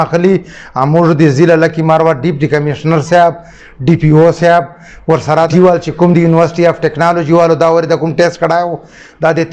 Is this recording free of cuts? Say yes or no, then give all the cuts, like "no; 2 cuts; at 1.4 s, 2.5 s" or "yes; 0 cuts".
no; 1 cut; at 5.5 s